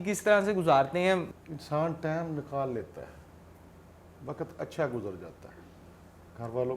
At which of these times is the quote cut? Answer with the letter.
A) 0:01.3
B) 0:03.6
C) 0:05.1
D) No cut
A